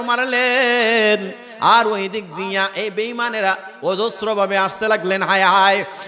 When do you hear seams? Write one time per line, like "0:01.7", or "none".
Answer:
none